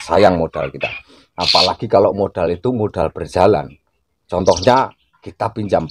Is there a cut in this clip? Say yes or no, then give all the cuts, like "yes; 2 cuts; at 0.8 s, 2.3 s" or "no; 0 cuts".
no; 0 cuts